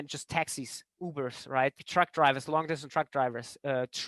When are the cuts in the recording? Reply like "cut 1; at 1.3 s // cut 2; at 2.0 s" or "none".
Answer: cut 1; at 1.8 s